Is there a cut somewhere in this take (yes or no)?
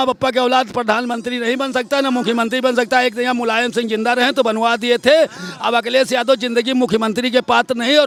no